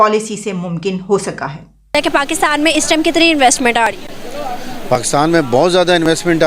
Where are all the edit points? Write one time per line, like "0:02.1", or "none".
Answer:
0:01.9